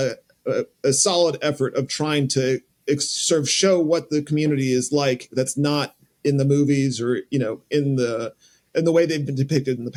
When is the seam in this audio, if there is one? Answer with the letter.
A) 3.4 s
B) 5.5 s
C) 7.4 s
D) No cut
D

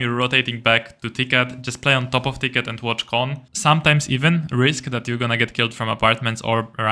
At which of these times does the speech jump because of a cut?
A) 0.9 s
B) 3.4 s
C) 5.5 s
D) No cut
B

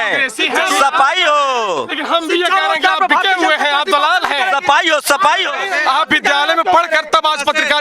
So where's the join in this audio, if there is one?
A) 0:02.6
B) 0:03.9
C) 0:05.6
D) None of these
C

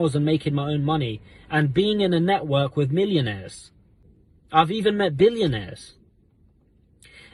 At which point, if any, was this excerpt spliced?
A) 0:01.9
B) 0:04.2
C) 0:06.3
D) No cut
D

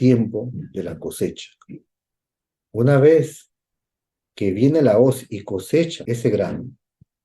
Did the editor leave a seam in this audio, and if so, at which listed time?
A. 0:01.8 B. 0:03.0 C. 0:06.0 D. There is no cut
C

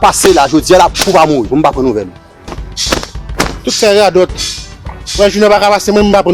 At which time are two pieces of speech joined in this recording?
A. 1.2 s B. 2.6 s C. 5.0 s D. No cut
B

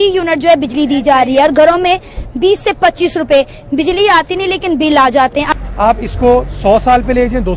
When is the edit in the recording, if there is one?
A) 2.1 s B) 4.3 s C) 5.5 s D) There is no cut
C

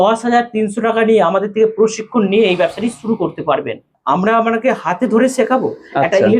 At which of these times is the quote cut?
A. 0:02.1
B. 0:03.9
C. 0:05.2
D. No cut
B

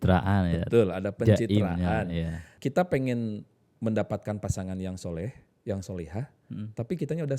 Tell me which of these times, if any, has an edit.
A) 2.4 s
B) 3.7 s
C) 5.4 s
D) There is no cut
A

